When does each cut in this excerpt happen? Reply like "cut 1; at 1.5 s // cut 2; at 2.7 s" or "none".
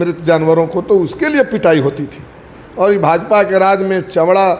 none